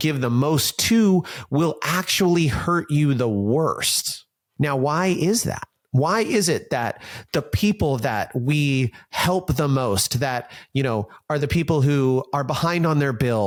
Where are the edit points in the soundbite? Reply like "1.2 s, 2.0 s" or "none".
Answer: none